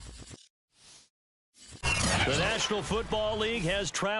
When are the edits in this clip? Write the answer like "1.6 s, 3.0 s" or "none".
1.8 s